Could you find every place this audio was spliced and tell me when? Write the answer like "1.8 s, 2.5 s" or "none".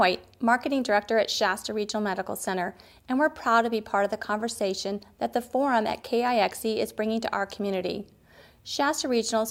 none